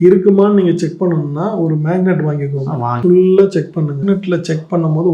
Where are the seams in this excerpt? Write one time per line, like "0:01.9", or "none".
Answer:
0:02.9
0:04.0